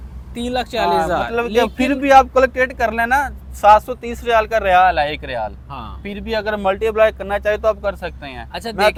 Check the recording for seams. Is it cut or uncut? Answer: uncut